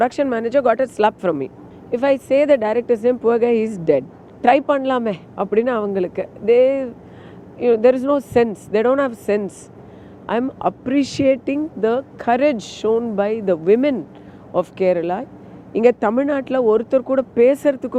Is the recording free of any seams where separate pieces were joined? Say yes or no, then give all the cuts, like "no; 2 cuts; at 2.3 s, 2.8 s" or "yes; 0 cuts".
yes; 0 cuts